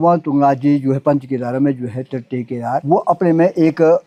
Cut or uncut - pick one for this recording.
uncut